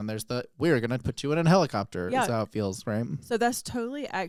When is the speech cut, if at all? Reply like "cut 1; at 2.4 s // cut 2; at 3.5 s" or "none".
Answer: none

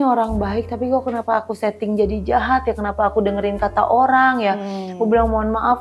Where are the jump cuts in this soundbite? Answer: none

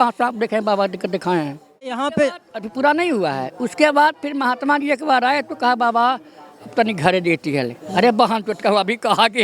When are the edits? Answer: cut 1; at 2.0 s

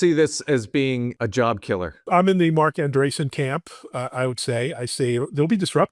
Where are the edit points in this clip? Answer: cut 1; at 1.1 s // cut 2; at 2.1 s

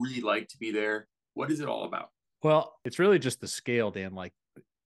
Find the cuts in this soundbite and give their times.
cut 1; at 2.8 s

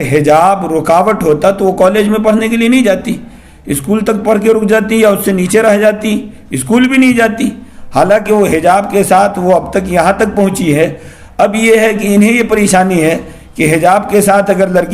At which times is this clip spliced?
none

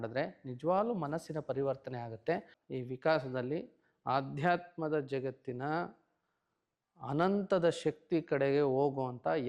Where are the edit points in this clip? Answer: cut 1; at 2.6 s

